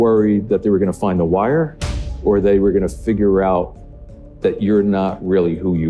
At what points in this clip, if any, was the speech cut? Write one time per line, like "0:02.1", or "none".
none